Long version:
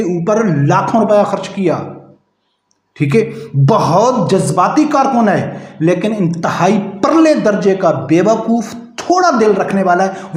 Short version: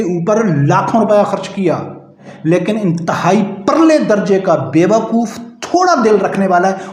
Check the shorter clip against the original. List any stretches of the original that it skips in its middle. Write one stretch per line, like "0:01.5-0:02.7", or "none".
0:02.2-0:05.6